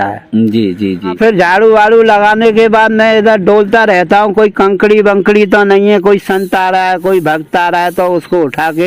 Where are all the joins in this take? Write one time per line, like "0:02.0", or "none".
0:01.2